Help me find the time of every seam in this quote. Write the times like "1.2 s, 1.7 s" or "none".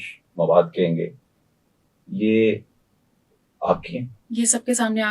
4.2 s

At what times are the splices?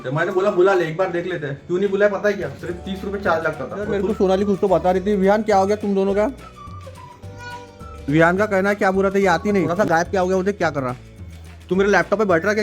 3.8 s, 9.7 s

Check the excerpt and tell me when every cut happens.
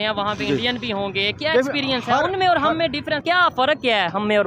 3.2 s

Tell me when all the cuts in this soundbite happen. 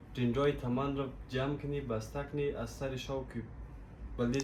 none

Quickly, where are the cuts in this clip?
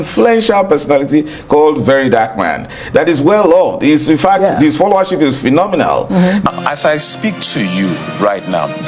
6.4 s

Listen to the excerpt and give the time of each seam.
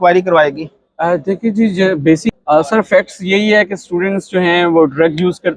2.3 s

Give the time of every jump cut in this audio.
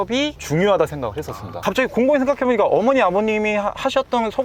1.6 s

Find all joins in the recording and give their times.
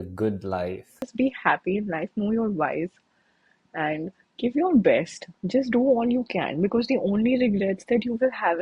1.1 s

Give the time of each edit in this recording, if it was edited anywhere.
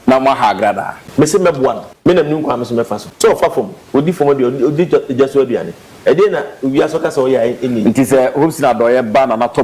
0.9 s, 1.9 s, 3.0 s

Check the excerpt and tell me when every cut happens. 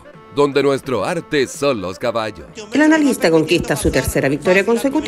2.3 s

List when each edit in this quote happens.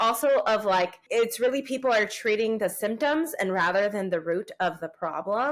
1.0 s

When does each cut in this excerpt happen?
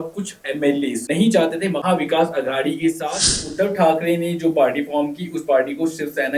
3.5 s

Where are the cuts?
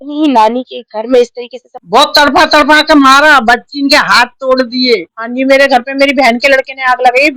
1.7 s, 5.2 s

